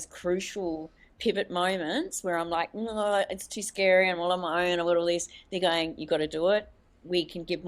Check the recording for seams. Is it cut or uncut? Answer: cut